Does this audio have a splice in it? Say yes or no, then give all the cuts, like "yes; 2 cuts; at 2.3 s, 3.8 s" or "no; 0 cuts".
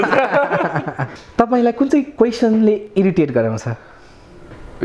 yes; 1 cut; at 1.0 s